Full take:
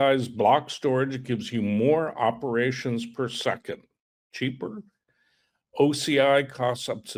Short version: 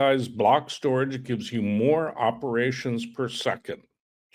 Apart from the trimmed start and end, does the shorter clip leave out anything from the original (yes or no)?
no